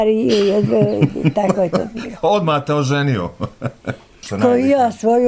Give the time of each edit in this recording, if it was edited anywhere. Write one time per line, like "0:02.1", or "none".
0:04.2